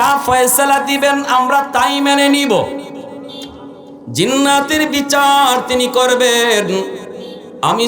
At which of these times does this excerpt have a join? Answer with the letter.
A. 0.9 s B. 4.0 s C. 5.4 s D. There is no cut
B